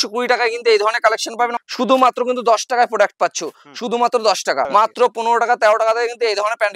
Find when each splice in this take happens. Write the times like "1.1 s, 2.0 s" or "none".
1.5 s, 4.7 s